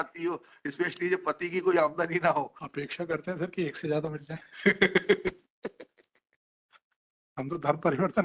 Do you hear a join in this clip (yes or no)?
no